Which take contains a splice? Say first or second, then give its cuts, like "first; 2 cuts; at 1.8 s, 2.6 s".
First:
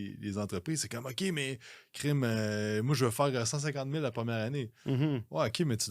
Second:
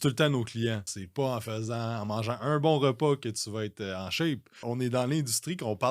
second; 2 cuts; at 1.0 s, 4.6 s